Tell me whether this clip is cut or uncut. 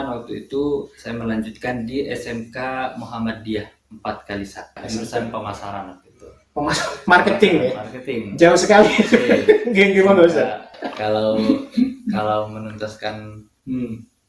cut